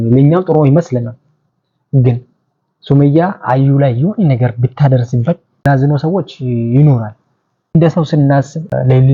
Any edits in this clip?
no; 0 cuts

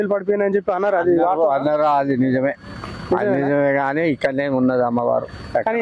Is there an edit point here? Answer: no; 0 cuts

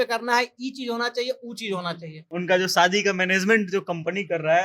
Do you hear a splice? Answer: yes; 1 cut; at 2.1 s

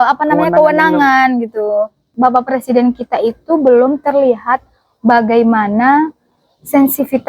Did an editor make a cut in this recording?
yes; 1 cut; at 2.1 s

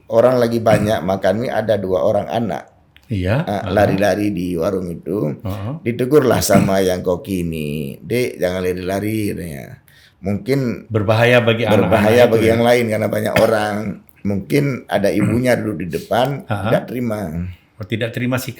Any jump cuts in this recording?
no; 0 cuts

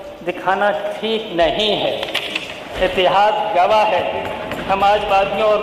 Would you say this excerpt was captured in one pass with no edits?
no; 1 cut; at 2.6 s

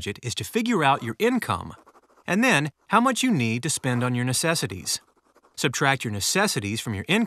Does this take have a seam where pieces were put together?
yes; 1 cut; at 6.3 s

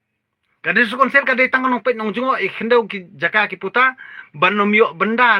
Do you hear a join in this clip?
no; 0 cuts

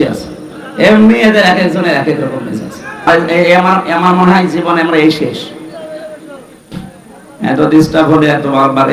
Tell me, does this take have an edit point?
yes; 1 cut; at 3.1 s

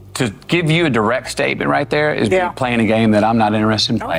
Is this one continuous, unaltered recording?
yes; 0 cuts

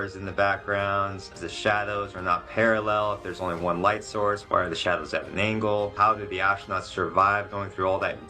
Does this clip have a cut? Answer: yes; 3 cuts; at 1.3 s, 4.4 s, 5.9 s

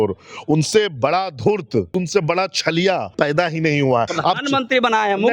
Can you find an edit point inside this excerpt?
yes; 3 cuts; at 1.9 s, 3.1 s, 4.1 s

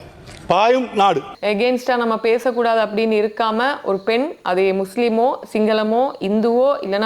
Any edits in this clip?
yes; 1 cut; at 1.3 s

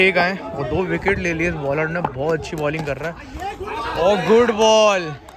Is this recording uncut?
yes; 0 cuts

